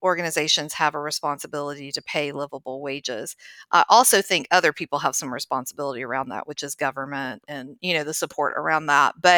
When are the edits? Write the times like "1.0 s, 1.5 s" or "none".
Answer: none